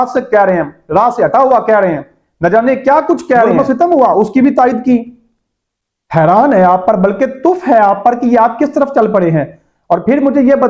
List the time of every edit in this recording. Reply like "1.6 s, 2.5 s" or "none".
3.5 s